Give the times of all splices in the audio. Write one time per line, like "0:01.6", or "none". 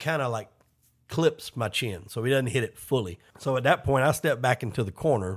0:03.2

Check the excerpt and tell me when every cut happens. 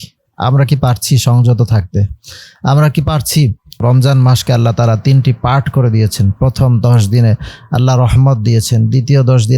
0:03.8

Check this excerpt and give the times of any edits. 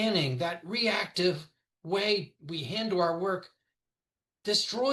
none

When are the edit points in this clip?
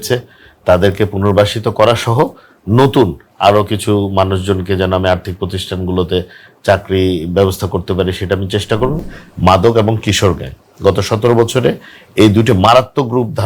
0:09.0

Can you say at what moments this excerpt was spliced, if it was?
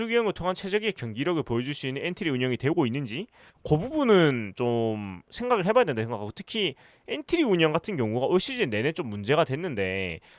none

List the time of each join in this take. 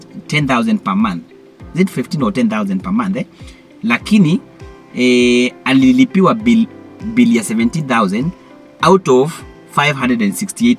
none

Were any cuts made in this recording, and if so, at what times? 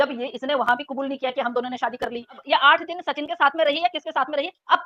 0:02.4

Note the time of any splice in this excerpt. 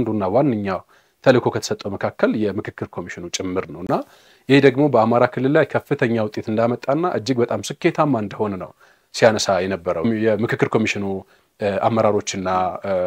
none

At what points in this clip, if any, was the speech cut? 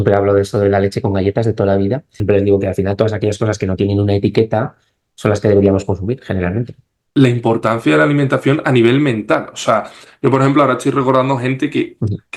0:02.2
0:07.0

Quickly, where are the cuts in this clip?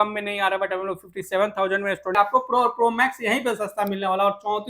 0:02.1

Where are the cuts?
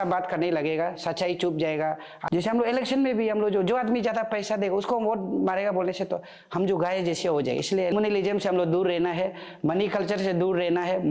0:02.1
0:07.9

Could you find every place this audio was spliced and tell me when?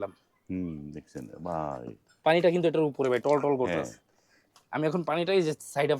none

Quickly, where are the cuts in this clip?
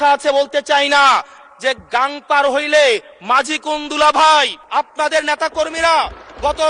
0:04.6

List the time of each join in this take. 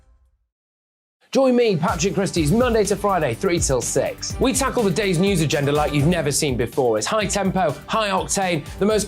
0:01.1

